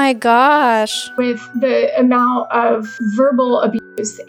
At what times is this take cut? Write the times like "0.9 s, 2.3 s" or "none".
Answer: 1.2 s, 2.9 s